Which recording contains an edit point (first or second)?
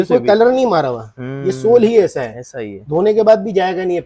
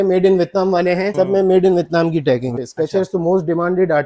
second